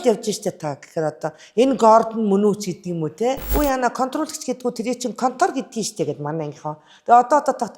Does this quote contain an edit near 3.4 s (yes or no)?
yes